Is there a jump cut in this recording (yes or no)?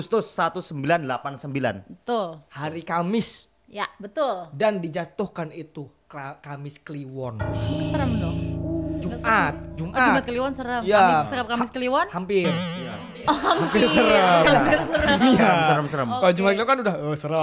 no